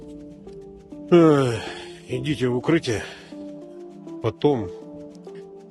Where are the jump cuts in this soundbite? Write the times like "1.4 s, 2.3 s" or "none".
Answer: 4.8 s